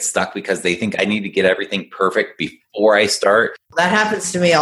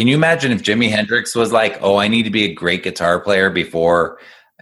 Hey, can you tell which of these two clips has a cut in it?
first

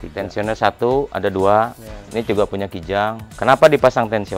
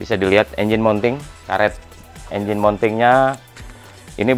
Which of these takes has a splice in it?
second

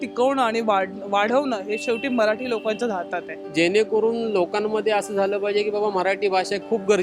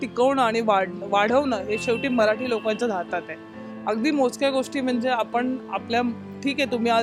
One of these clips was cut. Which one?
first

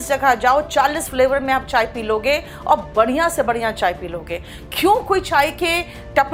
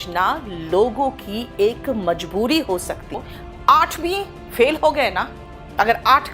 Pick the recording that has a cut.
second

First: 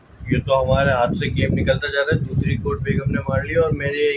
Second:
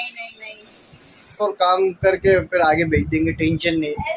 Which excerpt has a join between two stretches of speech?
second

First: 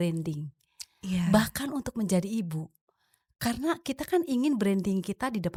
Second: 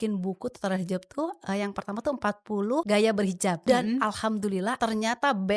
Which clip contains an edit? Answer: second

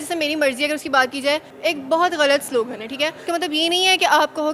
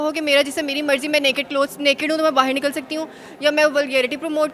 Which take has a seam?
first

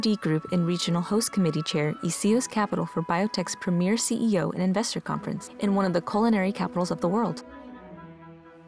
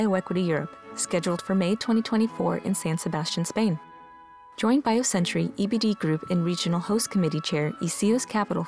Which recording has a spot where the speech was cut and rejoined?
first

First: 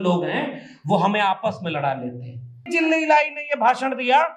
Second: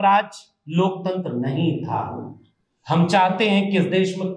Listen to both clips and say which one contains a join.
first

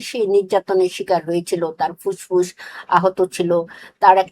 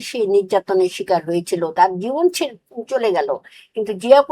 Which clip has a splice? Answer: second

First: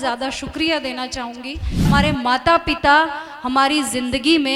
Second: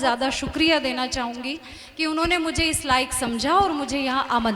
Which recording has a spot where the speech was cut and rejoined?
first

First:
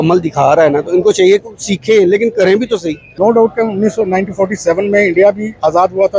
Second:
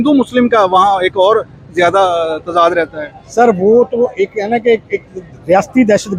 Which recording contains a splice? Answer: first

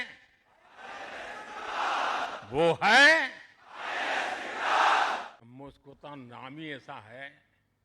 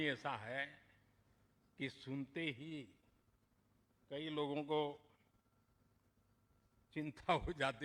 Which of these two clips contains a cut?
first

